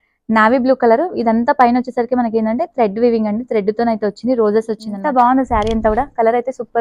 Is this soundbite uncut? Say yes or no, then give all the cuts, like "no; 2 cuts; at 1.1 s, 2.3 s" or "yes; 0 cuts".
no; 1 cut; at 4.9 s